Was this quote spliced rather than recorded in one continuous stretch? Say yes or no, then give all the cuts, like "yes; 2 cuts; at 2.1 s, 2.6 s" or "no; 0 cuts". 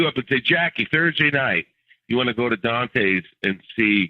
no; 0 cuts